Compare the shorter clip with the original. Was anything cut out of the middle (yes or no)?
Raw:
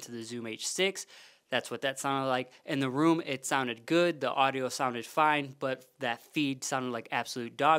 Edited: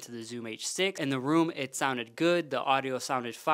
yes